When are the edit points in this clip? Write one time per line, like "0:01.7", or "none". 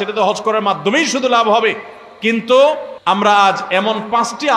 0:03.2